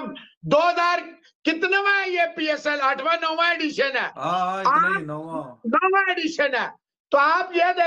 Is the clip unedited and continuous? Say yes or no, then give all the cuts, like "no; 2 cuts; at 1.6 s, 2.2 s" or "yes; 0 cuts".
yes; 0 cuts